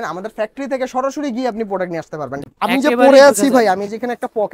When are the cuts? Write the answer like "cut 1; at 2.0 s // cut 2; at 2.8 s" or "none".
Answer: cut 1; at 2.4 s